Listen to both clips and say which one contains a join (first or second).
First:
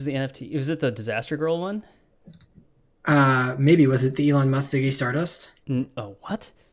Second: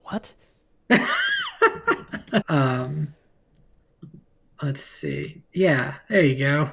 second